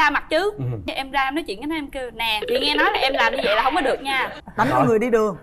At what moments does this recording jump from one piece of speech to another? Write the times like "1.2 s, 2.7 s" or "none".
4.3 s